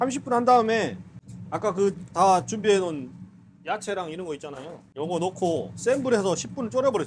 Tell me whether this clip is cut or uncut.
cut